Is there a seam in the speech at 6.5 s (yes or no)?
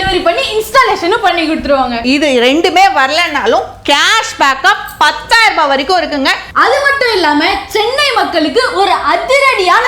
yes